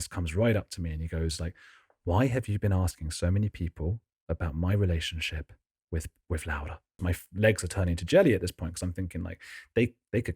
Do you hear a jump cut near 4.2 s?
no; 1 cut; at 7.0 s

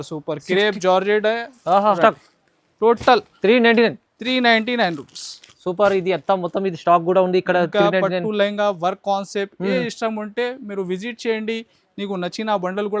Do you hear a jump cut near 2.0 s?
yes; 1 cut; at 2.0 s

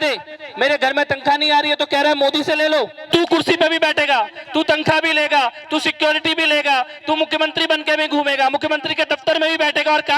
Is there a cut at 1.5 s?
no; 1 cut; at 3.0 s

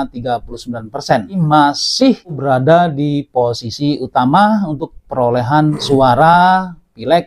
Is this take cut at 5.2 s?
no; 2 cuts; at 1.4 s, 2.4 s

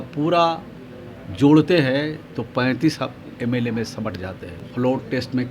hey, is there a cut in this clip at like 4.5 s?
yes; 1 cut; at 4.5 s

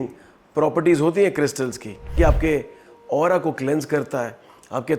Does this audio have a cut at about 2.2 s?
yes; 1 cut; at 2.2 s

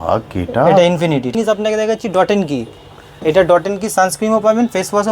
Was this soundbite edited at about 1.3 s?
yes; 1 cut; at 1.3 s

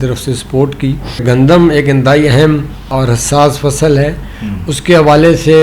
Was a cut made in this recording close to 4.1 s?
no; 2 cuts; at 1.2 s, 2.9 s

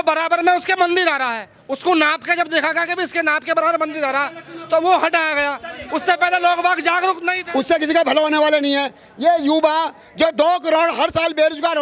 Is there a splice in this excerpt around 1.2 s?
no; 1 cut; at 7.3 s

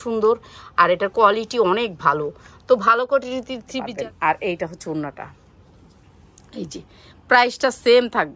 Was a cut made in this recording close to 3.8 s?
yes; 1 cut; at 3.8 s

